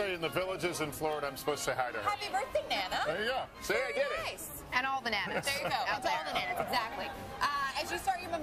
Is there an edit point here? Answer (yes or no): yes